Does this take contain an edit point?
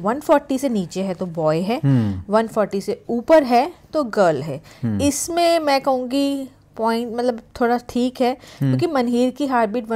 no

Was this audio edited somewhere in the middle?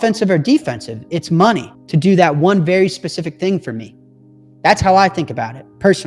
yes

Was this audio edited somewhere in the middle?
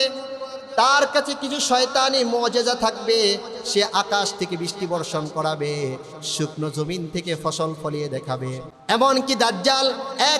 yes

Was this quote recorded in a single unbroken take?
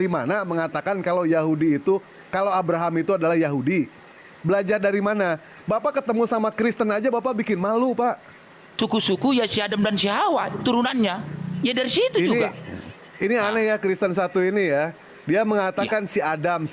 no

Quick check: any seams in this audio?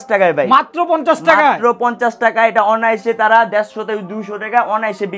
no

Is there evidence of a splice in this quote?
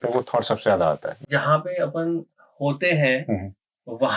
yes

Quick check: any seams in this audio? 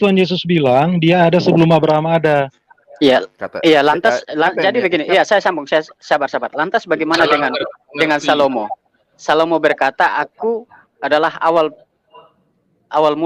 no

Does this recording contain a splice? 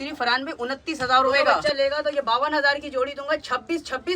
yes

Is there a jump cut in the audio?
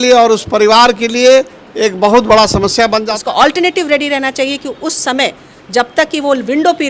yes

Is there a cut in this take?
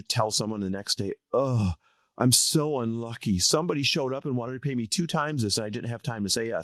no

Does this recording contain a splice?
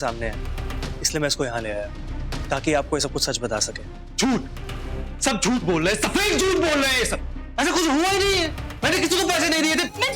no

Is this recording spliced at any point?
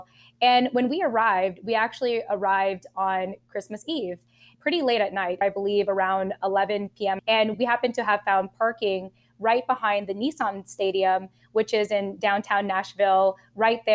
no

